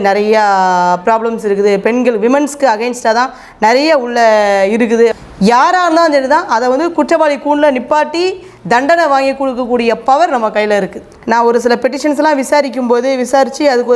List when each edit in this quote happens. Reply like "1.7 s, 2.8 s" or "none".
5.1 s, 11.1 s